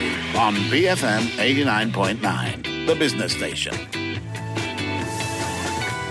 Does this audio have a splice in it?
no; 0 cuts

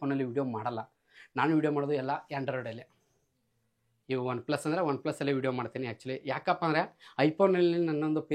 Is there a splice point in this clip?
no; 0 cuts

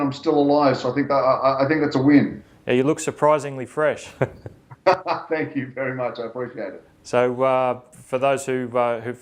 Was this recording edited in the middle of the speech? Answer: no; 0 cuts

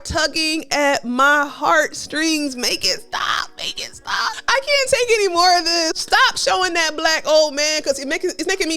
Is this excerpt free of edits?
no; 2 cuts; at 4.4 s, 6.0 s

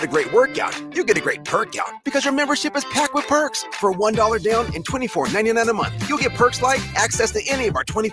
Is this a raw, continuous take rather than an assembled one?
yes; 0 cuts

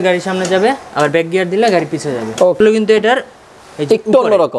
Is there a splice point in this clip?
yes; 1 cut; at 2.6 s

